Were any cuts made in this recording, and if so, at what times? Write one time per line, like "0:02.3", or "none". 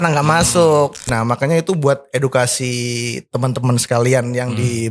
0:01.1